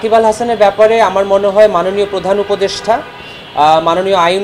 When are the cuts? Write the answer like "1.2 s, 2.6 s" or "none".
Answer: none